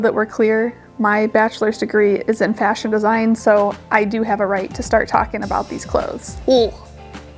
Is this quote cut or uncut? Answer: cut